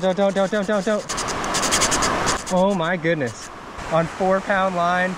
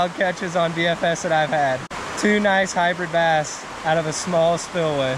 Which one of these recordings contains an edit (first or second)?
first